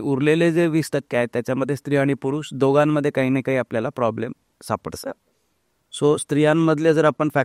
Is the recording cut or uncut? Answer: uncut